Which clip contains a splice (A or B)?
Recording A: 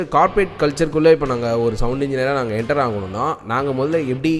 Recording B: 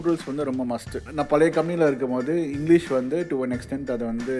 B